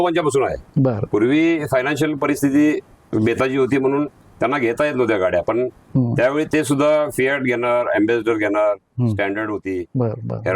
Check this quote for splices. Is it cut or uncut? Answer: uncut